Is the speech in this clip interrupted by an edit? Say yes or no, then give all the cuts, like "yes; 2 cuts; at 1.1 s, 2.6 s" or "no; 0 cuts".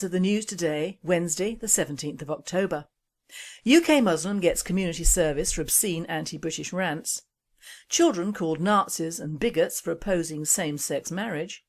yes; 1 cut; at 10.3 s